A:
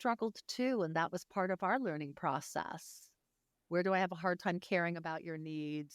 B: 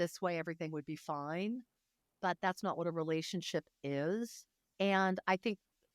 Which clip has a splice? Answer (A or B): B